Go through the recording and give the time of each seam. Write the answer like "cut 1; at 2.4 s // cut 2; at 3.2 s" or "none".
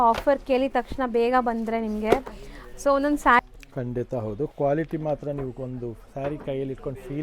cut 1; at 3.4 s